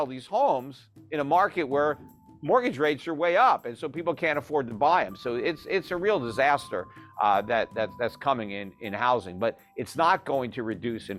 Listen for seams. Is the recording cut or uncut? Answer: uncut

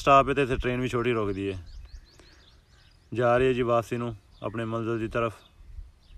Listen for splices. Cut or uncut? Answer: uncut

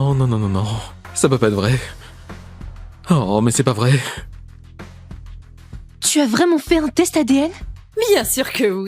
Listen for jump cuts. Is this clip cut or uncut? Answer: cut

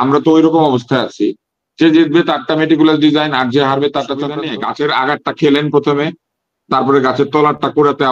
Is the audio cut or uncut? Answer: cut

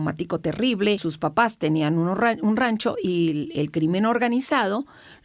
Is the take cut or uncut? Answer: cut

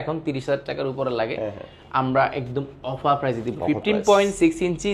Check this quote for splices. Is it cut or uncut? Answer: uncut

